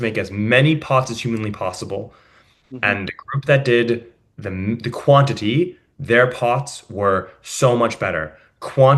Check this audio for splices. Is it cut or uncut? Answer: uncut